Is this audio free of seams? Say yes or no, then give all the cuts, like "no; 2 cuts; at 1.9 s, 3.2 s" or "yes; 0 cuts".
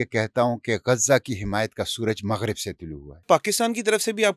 no; 1 cut; at 3.2 s